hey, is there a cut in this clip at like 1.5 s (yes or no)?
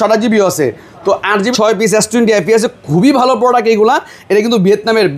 yes